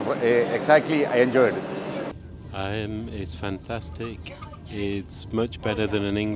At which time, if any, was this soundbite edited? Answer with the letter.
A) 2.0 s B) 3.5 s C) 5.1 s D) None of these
A